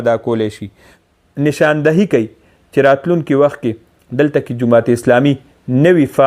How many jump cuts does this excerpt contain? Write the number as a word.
one